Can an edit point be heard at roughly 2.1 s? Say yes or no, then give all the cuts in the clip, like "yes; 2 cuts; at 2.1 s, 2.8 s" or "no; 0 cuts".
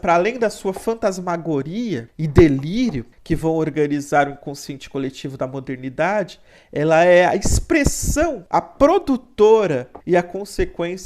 yes; 4 cuts; at 2.1 s, 3.1 s, 8.4 s, 9.9 s